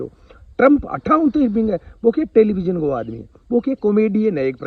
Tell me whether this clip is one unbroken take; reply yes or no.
yes